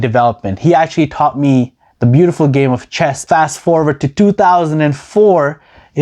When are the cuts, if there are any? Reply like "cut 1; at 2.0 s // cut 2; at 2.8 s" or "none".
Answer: cut 1; at 3.2 s